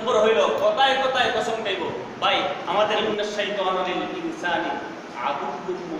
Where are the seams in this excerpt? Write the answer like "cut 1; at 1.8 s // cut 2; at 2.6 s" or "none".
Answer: cut 1; at 3.0 s